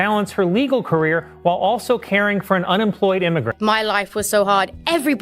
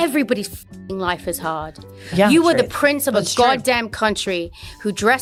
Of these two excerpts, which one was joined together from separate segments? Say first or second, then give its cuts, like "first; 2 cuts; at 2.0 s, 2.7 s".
first; 1 cut; at 3.5 s